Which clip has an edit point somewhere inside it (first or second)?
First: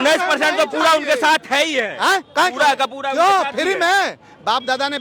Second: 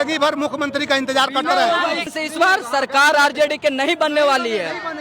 second